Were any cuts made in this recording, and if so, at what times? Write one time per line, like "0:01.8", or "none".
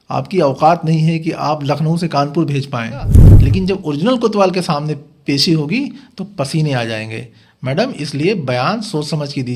0:03.2

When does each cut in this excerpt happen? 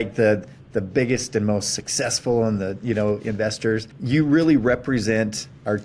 0:03.9

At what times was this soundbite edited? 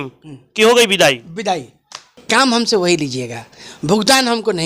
0:02.2

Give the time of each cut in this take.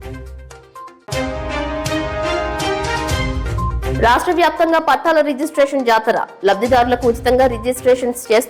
0:03.9

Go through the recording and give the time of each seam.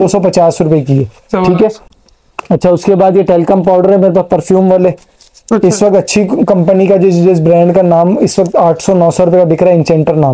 none

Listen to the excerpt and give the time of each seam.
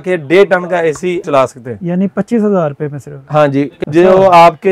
0:01.2
0:03.7

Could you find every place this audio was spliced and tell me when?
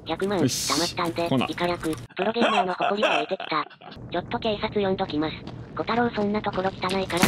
0:02.0
0:03.8

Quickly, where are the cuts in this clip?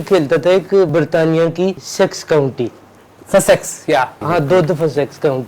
0:00.9
0:01.8
0:04.2

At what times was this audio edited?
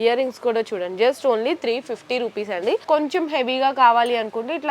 0:02.8

